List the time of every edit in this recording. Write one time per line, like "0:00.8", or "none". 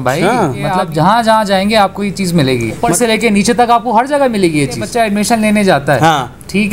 0:00.8
0:02.9
0:04.8